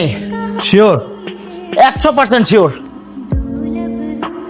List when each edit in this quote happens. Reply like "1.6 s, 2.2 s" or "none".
2.9 s